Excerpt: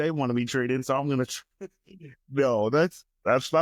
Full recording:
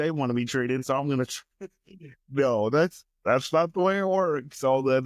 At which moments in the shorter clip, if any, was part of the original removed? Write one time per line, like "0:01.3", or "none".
none